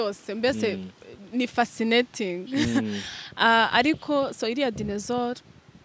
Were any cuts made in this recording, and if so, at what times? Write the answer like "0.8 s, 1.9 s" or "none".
none